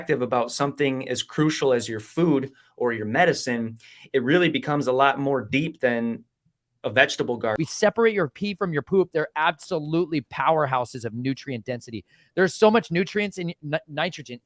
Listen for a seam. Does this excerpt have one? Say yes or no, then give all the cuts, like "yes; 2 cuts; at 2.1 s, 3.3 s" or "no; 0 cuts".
yes; 1 cut; at 7.6 s